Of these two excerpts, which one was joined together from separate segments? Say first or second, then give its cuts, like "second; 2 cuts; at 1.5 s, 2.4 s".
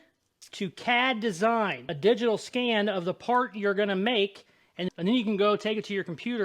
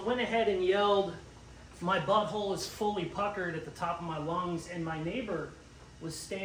first; 2 cuts; at 1.9 s, 4.8 s